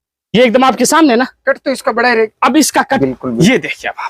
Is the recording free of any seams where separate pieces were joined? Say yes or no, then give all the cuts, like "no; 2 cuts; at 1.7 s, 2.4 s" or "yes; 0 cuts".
no; 1 cut; at 3.0 s